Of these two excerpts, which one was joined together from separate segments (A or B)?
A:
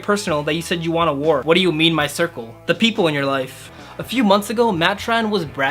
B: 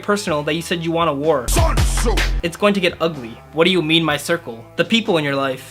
A